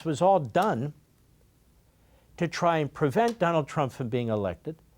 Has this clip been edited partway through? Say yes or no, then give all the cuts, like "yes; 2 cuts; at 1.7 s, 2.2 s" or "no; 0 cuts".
no; 0 cuts